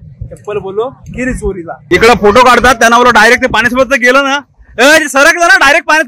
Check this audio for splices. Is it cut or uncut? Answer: cut